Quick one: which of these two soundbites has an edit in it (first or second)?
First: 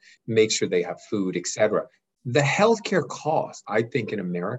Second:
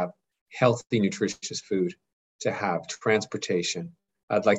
first